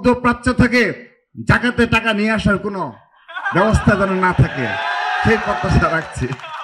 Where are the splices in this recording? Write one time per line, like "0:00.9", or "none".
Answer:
none

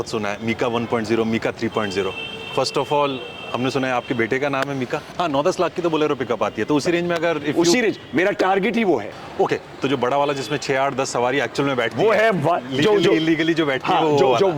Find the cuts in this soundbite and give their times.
0:05.1
0:09.2

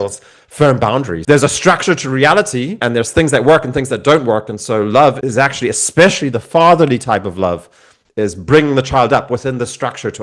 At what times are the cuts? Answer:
0:01.1
0:02.8
0:05.2

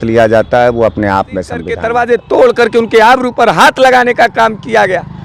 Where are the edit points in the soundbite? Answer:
0:01.8

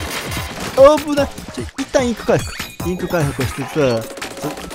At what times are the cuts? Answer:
none

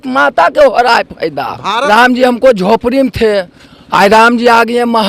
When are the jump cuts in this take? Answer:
0:01.7

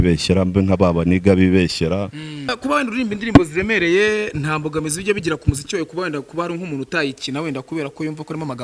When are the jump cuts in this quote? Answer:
0:02.5

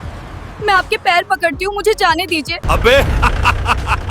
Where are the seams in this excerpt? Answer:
0:02.6

